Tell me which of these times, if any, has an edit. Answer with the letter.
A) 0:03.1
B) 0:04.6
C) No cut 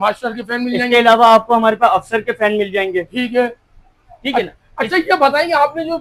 C